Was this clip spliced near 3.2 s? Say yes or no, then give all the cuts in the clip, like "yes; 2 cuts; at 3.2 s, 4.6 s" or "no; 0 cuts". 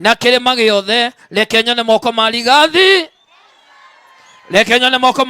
no; 1 cut; at 1.1 s